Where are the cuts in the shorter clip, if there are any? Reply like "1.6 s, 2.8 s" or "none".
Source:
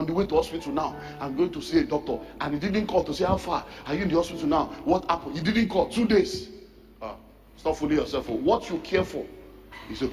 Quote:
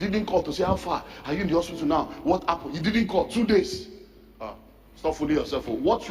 none